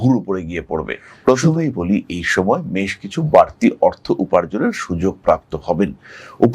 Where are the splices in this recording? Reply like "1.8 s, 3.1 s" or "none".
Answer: 1.1 s